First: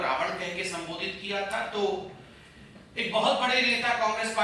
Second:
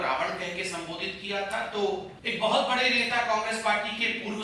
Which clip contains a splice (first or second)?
second